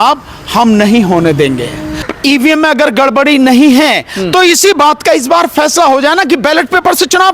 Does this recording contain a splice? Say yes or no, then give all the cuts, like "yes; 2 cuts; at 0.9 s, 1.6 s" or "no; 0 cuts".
yes; 1 cut; at 2.1 s